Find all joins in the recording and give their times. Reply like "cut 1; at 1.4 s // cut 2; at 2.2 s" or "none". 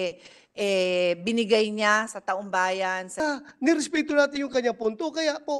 cut 1; at 3.2 s